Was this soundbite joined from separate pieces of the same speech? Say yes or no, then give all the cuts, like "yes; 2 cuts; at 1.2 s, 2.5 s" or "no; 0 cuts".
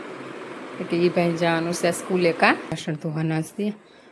yes; 1 cut; at 2.8 s